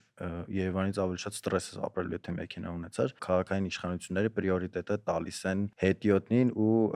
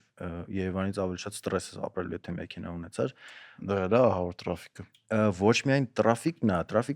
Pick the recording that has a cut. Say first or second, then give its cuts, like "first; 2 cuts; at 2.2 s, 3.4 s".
first; 2 cuts; at 3.2 s, 5.7 s